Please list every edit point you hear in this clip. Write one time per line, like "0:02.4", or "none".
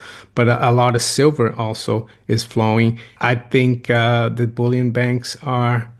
0:03.1